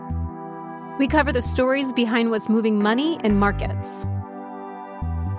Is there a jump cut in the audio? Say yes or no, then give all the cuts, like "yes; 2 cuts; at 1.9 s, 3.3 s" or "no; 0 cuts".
no; 0 cuts